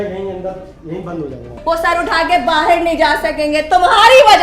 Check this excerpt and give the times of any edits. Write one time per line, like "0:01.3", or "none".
0:01.5